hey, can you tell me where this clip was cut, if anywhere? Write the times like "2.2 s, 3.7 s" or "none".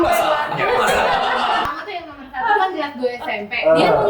1.7 s